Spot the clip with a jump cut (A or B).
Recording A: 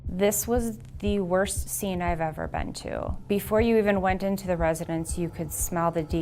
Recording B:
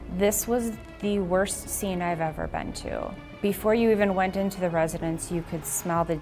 A